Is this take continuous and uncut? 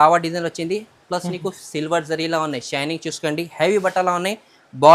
yes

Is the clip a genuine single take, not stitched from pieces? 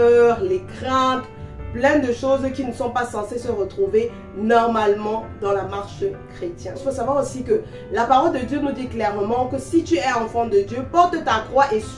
yes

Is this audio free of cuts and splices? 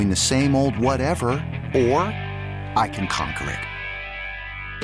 yes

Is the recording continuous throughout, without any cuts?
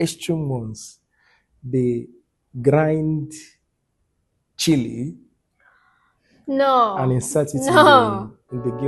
yes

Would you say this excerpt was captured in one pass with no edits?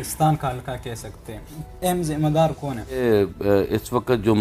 no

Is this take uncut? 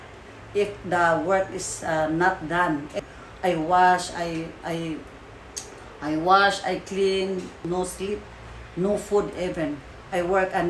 no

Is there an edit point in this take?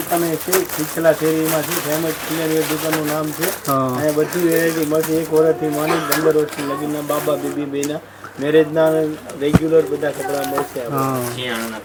no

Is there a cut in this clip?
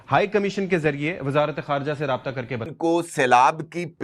yes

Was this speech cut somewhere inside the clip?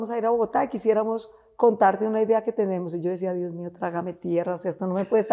no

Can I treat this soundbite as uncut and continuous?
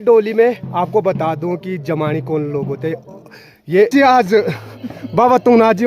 no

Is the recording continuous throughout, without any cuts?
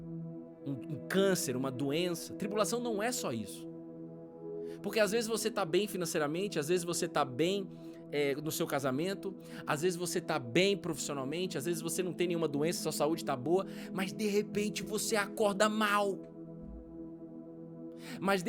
yes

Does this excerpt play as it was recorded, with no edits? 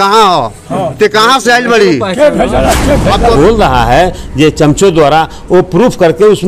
no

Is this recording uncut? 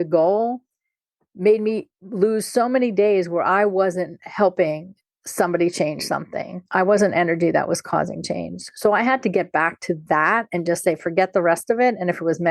yes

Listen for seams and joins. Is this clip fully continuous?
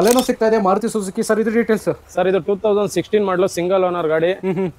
yes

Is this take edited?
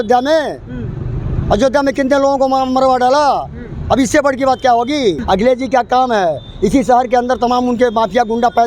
yes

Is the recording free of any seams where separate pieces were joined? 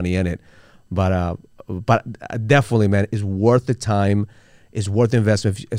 no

